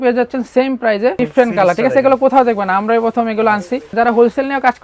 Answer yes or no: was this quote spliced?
yes